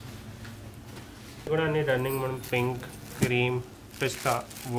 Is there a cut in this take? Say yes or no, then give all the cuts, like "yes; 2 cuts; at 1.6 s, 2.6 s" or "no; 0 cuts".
yes; 1 cut; at 1.5 s